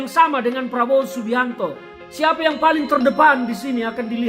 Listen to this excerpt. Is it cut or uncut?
cut